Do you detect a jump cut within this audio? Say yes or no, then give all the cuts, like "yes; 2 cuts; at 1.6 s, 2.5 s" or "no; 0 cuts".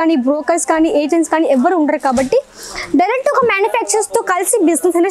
no; 0 cuts